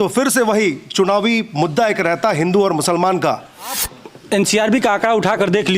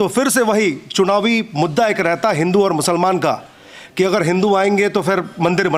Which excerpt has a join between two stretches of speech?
first; 1 cut; at 3.9 s

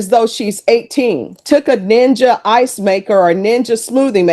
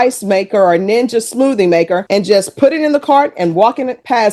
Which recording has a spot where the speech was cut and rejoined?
first; 1 cut; at 1.4 s

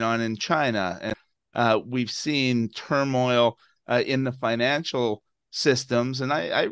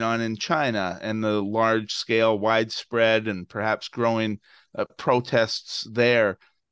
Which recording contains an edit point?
first; 1 cut; at 1.1 s

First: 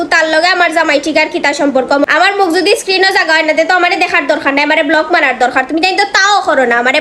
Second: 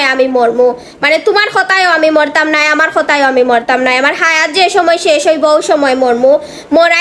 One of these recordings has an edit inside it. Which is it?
first; 1 cut; at 2.1 s

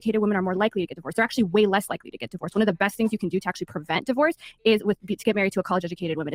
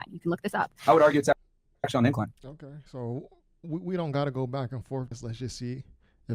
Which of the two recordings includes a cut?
second; 1 cut; at 5.1 s

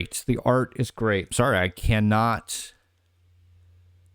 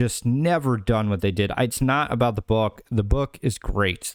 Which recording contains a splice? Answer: first; 1 cut; at 1.3 s

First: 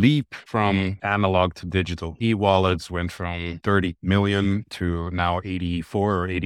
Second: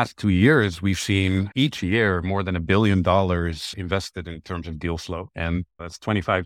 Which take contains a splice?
first; 3 cuts; at 0.7 s, 2.1 s, 3.9 s

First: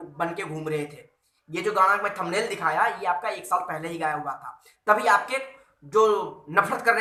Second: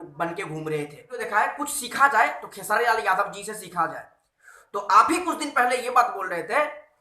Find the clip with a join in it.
second; 1 cut; at 1.2 s

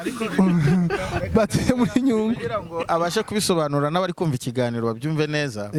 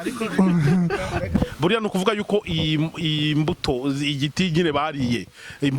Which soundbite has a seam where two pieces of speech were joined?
second; 1 cut; at 1.4 s

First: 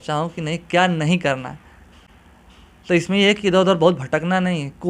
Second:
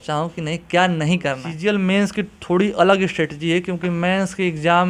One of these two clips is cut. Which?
second; 1 cut; at 1.5 s

